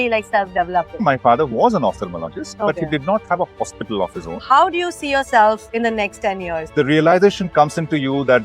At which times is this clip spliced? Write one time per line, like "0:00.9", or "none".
0:00.9
0:04.3
0:06.5